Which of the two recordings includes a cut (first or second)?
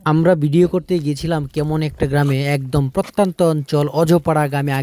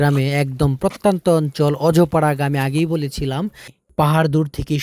second